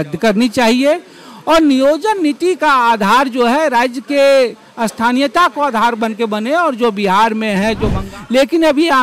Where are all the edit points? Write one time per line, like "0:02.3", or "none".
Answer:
0:08.1